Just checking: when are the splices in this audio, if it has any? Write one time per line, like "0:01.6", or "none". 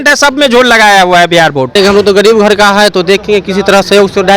0:01.7